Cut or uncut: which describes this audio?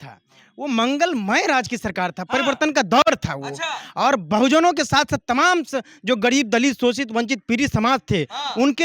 uncut